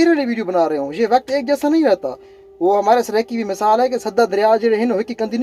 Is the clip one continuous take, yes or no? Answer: yes